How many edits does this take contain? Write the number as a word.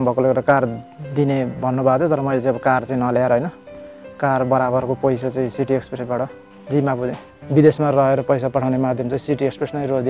one